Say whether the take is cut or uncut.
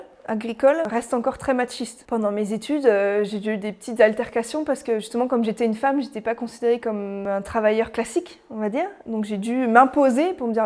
cut